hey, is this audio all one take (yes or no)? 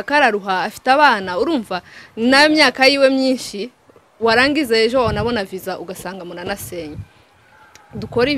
yes